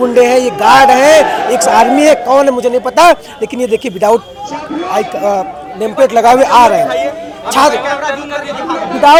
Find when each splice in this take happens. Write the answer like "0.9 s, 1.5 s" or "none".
none